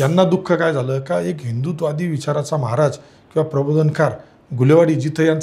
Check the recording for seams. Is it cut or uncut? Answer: uncut